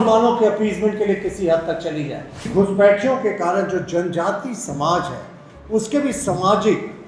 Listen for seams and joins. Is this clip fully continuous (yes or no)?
no